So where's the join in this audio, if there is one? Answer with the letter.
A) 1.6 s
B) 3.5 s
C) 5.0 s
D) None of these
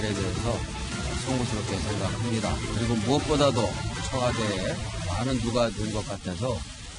C